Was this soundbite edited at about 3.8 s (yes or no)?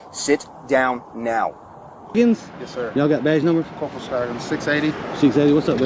no